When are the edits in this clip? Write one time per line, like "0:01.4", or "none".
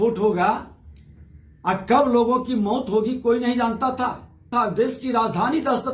0:04.5